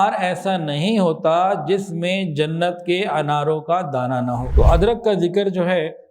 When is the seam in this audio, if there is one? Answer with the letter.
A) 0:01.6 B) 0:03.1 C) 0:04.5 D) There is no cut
C